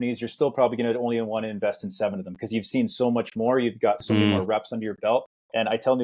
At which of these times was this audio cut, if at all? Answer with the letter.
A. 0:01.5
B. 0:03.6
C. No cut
C